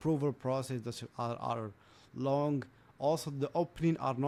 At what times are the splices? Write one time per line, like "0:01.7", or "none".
none